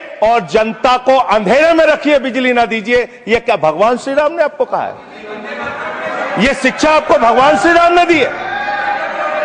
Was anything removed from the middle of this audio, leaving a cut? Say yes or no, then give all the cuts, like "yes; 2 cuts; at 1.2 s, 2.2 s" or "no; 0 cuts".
no; 0 cuts